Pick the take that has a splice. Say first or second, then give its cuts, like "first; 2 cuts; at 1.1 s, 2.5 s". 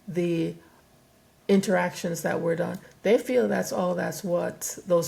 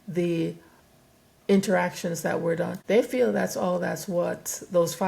second; 1 cut; at 2.8 s